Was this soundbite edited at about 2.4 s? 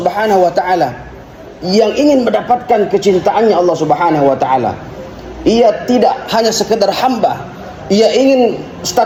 no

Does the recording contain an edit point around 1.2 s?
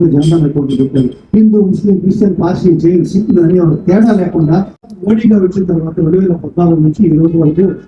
no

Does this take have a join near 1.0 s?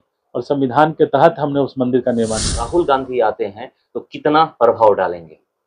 no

